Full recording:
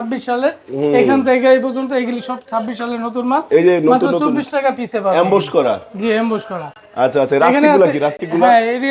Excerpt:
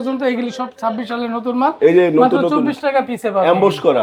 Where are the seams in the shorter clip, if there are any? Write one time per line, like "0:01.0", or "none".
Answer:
none